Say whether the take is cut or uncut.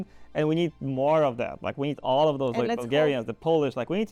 uncut